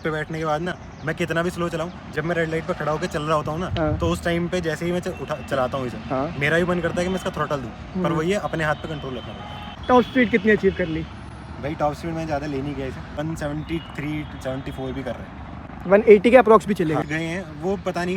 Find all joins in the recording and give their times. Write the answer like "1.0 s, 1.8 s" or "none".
9.7 s, 13.1 s, 17.0 s